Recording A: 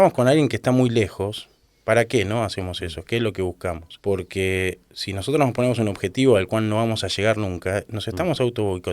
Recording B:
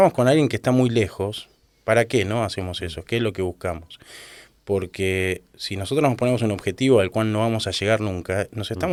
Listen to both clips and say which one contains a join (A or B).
A